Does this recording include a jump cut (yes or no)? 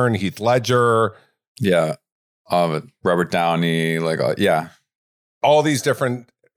no